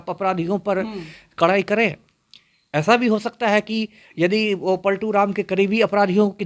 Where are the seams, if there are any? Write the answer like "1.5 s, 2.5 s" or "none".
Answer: none